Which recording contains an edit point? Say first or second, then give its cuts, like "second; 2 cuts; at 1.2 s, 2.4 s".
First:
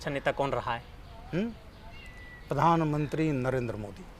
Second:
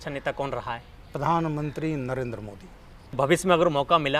second; 2 cuts; at 0.9 s, 3.2 s